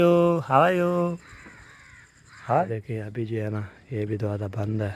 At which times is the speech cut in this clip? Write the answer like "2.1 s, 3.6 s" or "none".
2.7 s